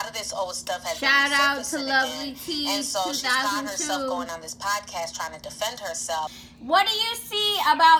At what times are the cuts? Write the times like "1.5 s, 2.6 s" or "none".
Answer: 6.5 s